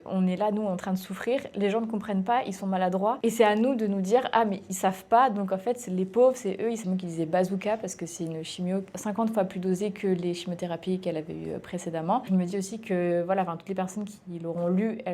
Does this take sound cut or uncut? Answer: cut